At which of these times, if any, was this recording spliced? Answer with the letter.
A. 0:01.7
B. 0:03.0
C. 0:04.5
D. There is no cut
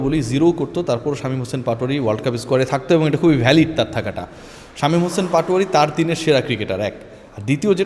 D